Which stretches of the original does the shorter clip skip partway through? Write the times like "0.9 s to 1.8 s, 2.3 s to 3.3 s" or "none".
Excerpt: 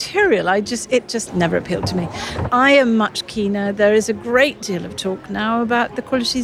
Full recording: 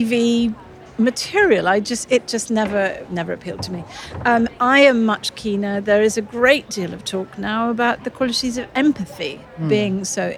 2.4 s to 3.0 s, 4.2 s to 4.5 s